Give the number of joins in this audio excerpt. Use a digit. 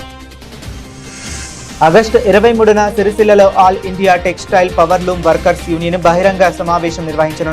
1